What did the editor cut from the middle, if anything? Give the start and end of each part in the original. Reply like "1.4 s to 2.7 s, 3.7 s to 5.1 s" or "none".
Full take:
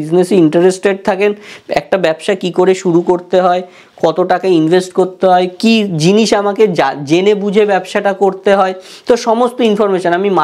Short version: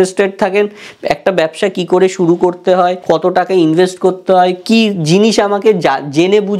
3.6 s to 3.9 s